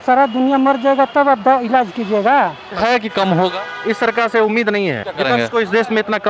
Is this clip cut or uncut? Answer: cut